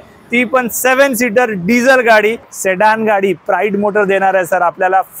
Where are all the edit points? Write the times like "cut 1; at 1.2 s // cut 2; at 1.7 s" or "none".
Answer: cut 1; at 2.5 s

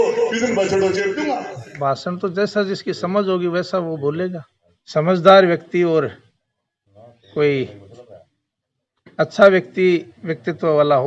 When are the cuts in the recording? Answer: cut 1; at 1.7 s // cut 2; at 4.5 s

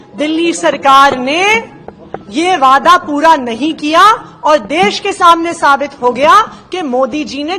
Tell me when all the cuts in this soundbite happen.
none

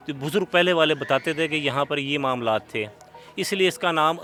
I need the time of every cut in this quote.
none

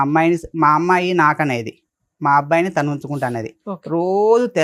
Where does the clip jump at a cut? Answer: none

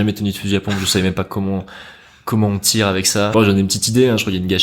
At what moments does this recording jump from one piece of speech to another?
cut 1; at 3.3 s

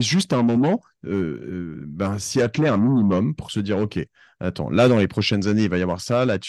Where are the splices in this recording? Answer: none

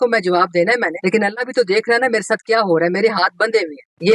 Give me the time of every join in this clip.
none

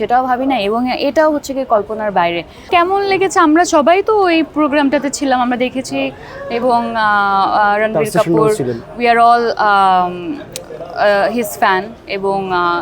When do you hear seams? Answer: cut 1; at 2.6 s

